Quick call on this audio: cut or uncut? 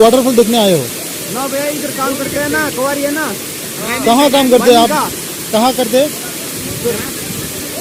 uncut